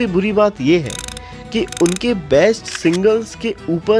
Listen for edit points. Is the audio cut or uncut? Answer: uncut